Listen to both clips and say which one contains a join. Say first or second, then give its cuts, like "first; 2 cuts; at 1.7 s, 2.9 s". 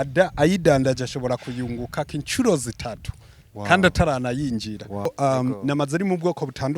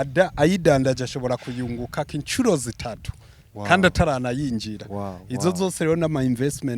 first; 1 cut; at 5.1 s